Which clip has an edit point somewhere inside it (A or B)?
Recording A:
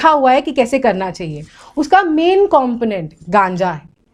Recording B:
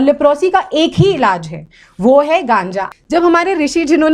B